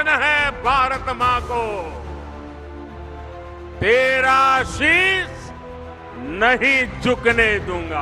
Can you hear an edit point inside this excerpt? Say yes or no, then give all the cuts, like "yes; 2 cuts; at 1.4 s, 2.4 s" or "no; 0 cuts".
yes; 2 cuts; at 1.9 s, 3.8 s